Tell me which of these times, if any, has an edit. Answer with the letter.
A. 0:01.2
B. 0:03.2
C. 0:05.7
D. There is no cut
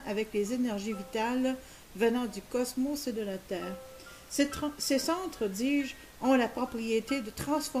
C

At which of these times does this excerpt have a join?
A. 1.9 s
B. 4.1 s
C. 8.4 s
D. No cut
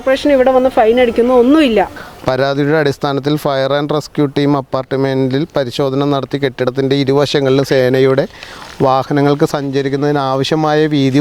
A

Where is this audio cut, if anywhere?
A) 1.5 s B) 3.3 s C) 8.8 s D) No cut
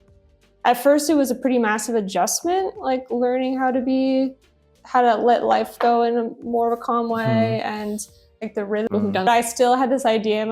C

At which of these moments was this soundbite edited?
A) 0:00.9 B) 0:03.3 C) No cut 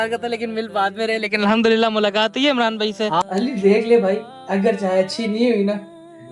B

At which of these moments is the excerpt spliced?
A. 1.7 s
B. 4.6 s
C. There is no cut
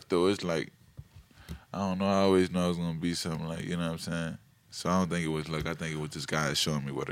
C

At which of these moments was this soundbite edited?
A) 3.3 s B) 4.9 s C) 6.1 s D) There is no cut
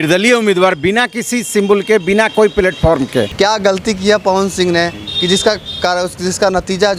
A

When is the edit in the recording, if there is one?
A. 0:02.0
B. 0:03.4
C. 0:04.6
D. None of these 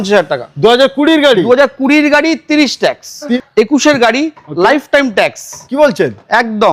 B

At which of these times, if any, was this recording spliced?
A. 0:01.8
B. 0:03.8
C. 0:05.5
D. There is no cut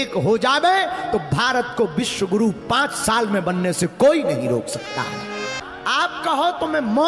C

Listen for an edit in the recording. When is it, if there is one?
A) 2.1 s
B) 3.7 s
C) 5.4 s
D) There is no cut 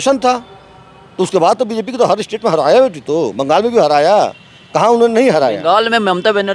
D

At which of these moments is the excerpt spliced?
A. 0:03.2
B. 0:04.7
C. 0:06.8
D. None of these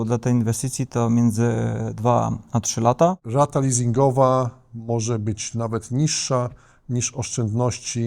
A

